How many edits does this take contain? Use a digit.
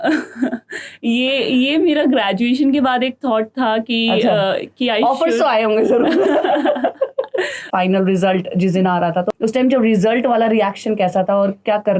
2